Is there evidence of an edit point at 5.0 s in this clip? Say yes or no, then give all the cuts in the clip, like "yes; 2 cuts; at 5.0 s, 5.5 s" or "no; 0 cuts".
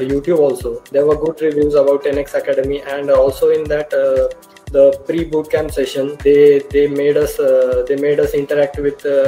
no; 0 cuts